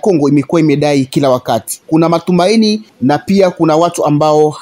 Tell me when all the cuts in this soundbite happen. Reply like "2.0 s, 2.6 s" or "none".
1.7 s, 2.9 s